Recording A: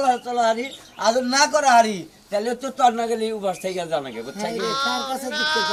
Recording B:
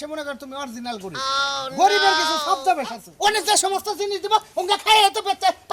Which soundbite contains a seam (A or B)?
B